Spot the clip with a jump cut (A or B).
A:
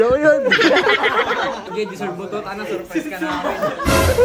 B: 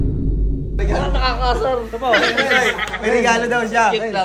A